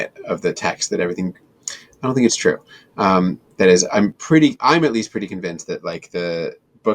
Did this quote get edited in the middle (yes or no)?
no